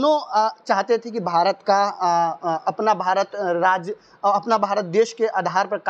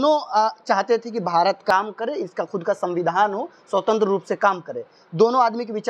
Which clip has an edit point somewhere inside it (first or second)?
second